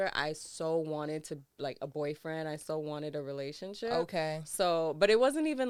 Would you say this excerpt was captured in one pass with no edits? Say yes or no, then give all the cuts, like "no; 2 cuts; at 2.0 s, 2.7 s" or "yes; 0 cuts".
yes; 0 cuts